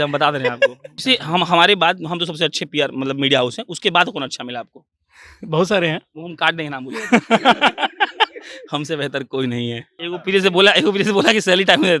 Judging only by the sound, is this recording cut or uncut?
cut